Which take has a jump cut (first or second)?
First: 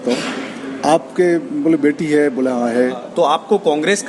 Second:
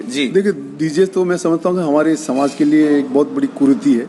first